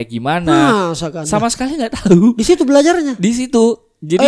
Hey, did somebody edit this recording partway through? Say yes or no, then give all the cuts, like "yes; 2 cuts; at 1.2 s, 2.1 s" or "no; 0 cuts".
no; 0 cuts